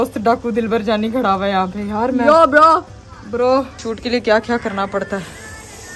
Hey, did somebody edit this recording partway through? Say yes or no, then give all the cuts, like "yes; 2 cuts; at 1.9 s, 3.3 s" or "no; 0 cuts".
no; 0 cuts